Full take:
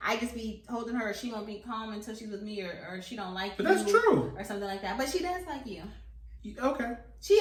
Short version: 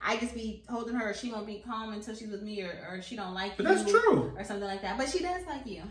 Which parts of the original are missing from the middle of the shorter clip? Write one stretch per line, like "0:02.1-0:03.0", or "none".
none